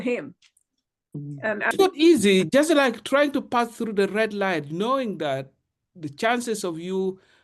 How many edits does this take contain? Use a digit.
1